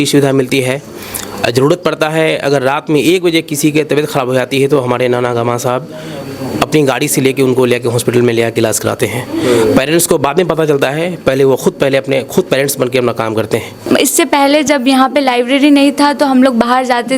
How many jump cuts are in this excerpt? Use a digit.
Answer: 1